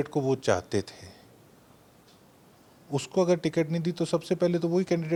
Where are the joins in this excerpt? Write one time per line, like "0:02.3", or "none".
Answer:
none